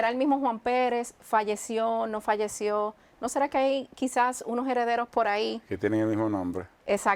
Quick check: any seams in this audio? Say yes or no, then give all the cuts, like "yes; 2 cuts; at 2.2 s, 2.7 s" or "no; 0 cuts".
no; 0 cuts